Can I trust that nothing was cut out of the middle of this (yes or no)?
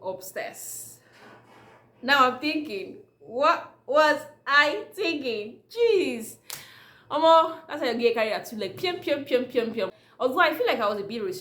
yes